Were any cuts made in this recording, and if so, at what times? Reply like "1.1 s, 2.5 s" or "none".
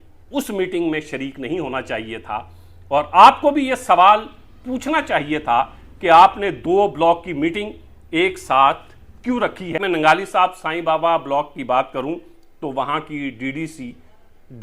9.7 s